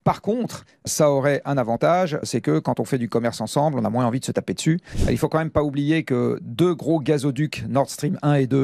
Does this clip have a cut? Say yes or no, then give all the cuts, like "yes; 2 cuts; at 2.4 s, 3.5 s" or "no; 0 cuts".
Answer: yes; 1 cut; at 4.9 s